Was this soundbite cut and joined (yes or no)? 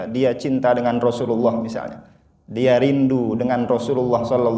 no